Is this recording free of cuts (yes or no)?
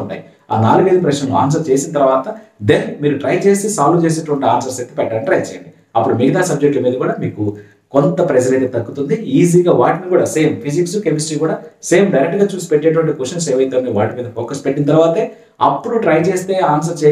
yes